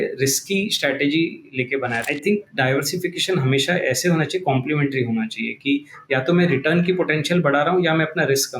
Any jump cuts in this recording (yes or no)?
yes